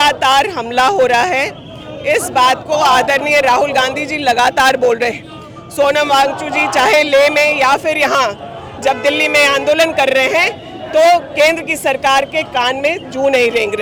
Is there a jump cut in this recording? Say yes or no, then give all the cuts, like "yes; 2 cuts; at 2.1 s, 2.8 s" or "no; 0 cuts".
no; 0 cuts